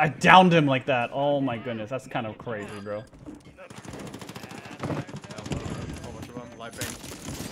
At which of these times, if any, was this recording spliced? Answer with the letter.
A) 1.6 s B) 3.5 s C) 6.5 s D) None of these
B